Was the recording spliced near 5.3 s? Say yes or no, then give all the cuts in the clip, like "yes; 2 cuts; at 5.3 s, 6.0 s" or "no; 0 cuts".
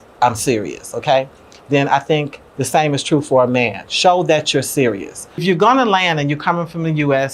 yes; 1 cut; at 5.3 s